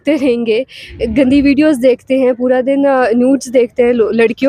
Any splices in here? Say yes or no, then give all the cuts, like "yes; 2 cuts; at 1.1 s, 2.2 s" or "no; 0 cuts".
no; 0 cuts